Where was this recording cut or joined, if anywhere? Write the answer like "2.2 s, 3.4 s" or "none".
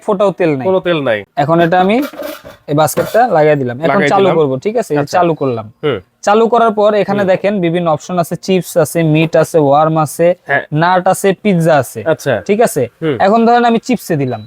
1.3 s